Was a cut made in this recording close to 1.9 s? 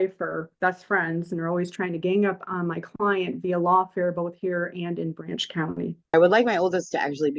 no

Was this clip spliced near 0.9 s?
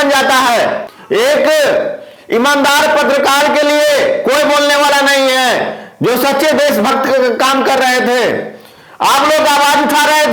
yes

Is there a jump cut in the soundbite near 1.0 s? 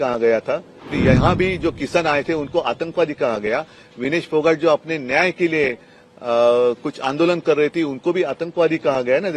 yes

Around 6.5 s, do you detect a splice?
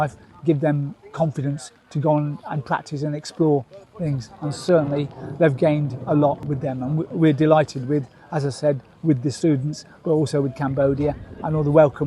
yes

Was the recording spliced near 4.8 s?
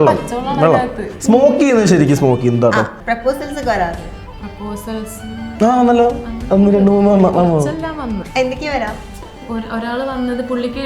no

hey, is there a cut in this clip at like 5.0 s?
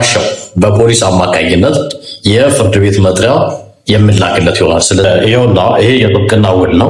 yes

